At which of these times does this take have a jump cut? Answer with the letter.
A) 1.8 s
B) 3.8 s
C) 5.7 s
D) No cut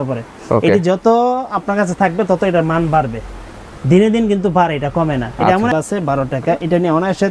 C